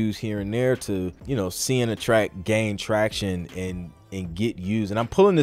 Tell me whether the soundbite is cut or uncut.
cut